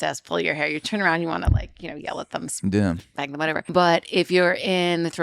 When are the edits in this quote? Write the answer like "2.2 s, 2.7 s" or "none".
3.6 s